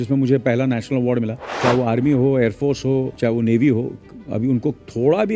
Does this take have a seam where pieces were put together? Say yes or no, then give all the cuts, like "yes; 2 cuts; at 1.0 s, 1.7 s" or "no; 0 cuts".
yes; 2 cuts; at 1.4 s, 3.1 s